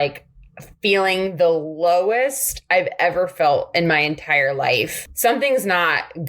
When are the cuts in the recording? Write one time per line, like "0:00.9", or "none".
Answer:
0:05.0